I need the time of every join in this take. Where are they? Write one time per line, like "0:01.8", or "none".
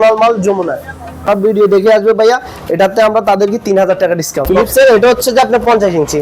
0:01.3
0:04.5